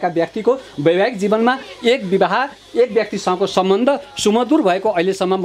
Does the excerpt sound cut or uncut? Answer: uncut